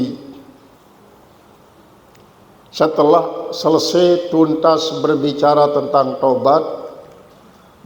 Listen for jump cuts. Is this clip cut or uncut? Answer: uncut